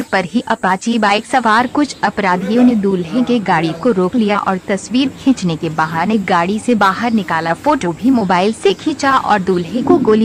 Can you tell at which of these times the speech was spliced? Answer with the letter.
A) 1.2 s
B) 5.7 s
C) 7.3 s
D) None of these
D